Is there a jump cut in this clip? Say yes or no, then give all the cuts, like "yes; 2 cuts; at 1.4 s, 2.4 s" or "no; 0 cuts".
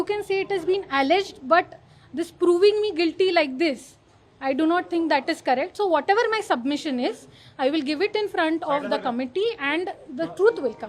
no; 0 cuts